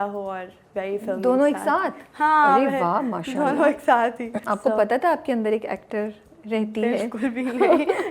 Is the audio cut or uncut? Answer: uncut